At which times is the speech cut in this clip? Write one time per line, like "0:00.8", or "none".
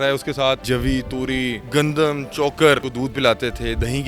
0:01.0
0:02.9